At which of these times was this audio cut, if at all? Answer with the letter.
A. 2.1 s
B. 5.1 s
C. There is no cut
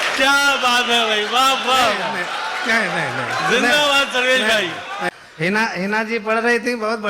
B